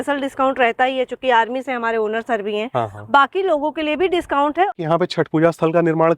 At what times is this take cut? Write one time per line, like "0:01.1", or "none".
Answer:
0:04.7